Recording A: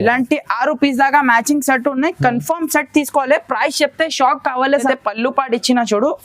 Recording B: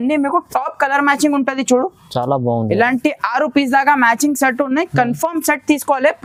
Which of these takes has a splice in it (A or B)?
A